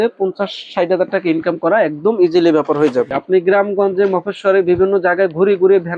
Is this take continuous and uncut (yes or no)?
no